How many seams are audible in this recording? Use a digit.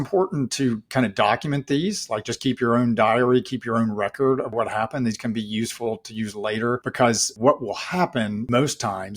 3